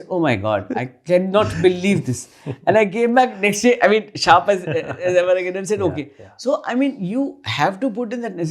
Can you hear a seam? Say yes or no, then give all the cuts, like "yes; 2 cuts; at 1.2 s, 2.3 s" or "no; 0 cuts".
no; 0 cuts